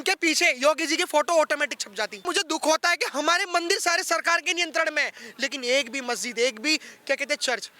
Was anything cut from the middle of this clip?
yes; 1 cut; at 2.2 s

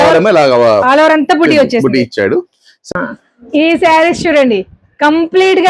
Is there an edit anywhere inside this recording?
yes; 1 cut; at 2.7 s

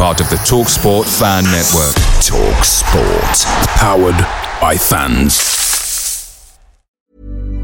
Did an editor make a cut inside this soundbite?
yes; 1 cut; at 6.7 s

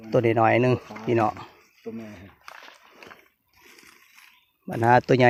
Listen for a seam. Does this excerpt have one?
no; 0 cuts

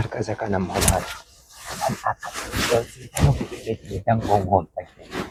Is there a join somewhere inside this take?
no; 0 cuts

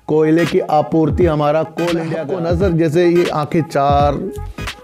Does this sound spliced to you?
yes; 1 cut; at 2.1 s

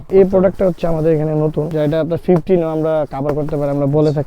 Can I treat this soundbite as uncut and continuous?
no; 1 cut; at 1.7 s

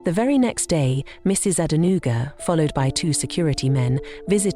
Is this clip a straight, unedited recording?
yes; 0 cuts

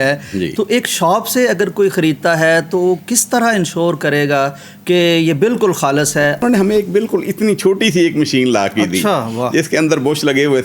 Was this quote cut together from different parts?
yes; 1 cut; at 6.4 s

